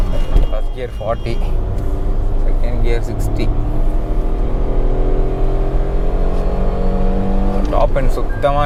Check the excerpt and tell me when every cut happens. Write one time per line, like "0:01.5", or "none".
none